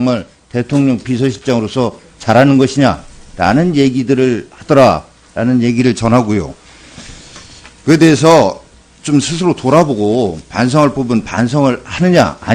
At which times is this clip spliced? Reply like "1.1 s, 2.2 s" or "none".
11.0 s